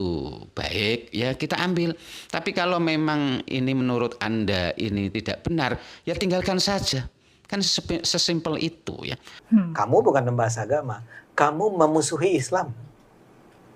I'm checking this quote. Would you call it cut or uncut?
cut